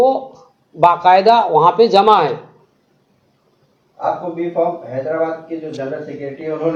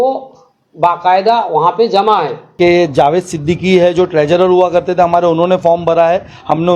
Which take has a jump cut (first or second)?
second